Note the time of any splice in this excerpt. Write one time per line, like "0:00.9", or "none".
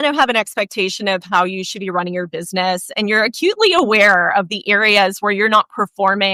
none